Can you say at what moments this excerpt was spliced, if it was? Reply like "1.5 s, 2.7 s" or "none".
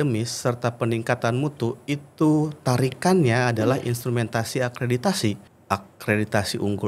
5.4 s